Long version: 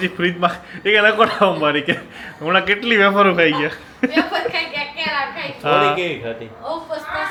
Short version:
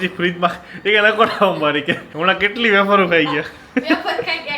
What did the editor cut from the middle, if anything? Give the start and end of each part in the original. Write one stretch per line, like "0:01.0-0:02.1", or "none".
0:02.0-0:02.3